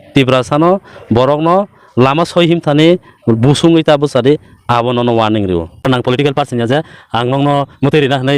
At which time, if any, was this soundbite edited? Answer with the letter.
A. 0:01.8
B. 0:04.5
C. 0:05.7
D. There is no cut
C